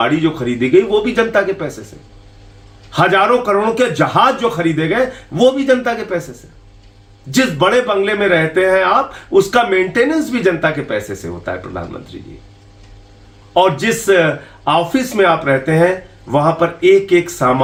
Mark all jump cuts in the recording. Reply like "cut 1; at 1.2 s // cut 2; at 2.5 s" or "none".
none